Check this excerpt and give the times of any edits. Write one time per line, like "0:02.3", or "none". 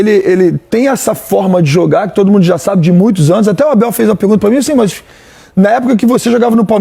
none